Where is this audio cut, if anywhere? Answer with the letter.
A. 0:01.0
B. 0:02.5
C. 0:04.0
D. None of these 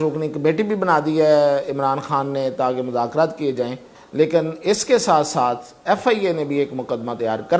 C